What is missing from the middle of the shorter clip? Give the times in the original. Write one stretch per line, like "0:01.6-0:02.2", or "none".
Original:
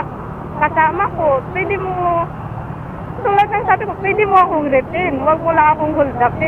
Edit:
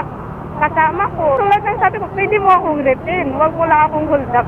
0:01.4-0:03.2